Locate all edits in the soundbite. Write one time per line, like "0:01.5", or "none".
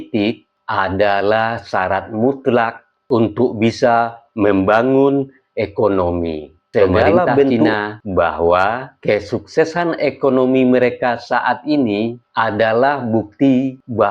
0:07.8